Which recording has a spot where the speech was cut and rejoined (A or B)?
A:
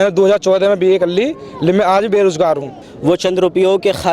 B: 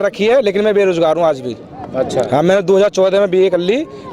A